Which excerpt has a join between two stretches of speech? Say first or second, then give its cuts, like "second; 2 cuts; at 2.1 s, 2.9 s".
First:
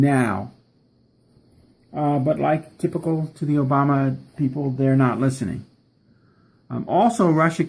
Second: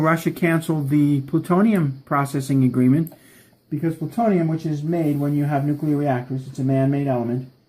second; 1 cut; at 5.5 s